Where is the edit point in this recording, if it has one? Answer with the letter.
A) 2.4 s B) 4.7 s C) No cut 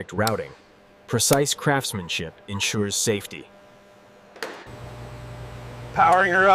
B